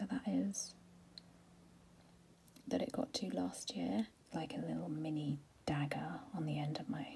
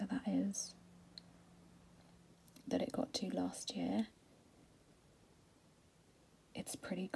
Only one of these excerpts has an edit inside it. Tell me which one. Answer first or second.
first